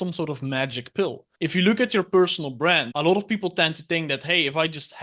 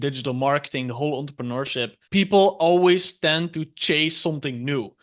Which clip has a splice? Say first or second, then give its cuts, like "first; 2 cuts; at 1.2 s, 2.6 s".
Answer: first; 1 cut; at 1.2 s